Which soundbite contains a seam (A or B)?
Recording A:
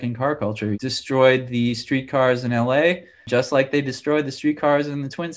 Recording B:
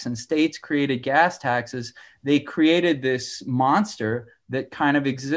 A